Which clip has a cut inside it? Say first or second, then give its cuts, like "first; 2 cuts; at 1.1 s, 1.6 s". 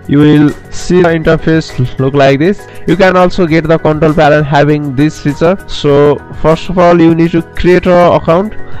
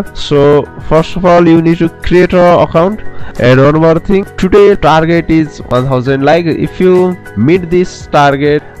first; 1 cut; at 1.1 s